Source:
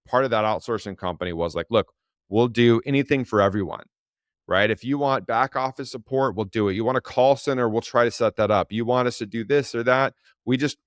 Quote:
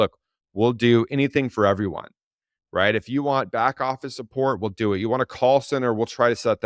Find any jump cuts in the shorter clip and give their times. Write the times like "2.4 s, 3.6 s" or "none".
none